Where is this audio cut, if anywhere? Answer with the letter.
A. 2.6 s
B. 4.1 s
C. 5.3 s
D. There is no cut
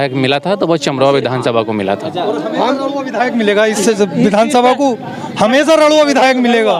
D